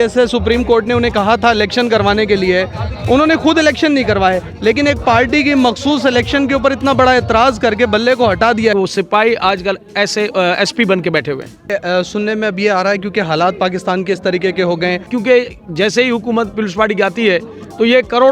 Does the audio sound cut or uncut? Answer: cut